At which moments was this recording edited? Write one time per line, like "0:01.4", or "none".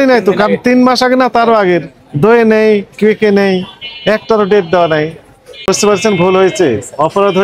0:05.6